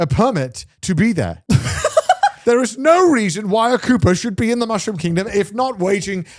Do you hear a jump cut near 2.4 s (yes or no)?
yes